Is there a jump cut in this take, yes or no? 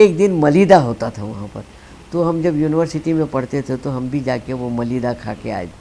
no